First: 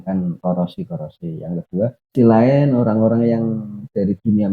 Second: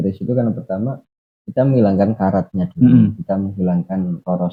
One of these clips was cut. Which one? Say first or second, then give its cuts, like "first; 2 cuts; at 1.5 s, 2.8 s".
first; 1 cut; at 2.1 s